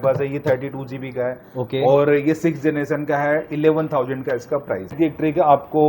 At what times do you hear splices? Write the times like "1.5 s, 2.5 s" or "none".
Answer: 4.9 s